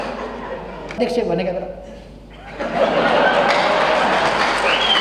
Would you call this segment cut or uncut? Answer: cut